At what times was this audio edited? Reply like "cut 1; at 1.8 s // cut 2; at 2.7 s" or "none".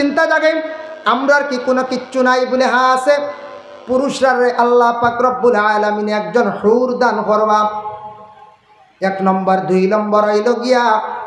none